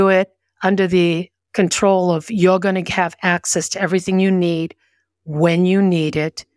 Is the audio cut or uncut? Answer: cut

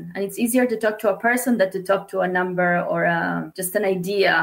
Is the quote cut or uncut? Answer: cut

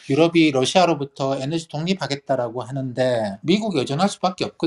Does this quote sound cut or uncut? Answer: cut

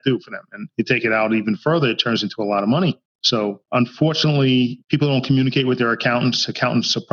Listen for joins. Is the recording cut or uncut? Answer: uncut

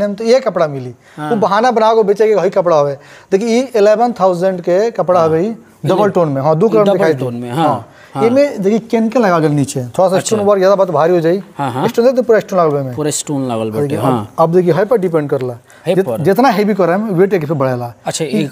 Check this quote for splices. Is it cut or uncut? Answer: uncut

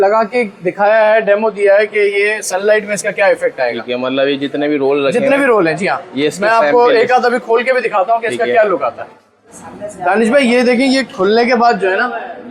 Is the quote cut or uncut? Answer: uncut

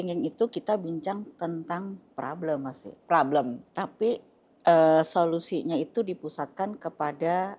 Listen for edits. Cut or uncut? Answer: uncut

